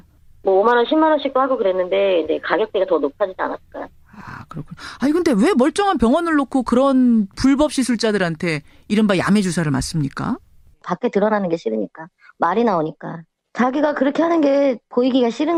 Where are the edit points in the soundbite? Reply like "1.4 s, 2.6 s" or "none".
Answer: none